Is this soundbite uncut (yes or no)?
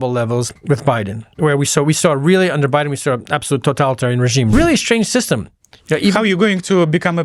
no